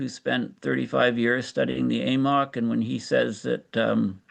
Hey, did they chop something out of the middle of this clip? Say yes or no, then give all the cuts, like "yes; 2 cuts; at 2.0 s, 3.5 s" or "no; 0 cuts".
no; 0 cuts